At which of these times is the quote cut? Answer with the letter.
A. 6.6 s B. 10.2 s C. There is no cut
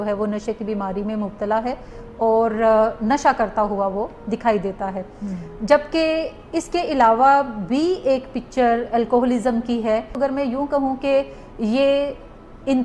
B